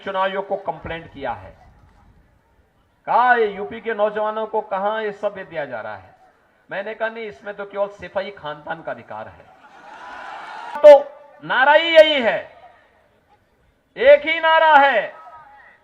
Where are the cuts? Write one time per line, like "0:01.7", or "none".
0:10.8